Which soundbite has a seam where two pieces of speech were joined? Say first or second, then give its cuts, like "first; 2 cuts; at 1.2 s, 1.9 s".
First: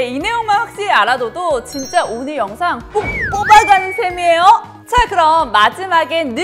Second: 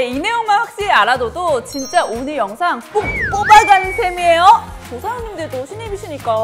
second; 1 cut; at 4.8 s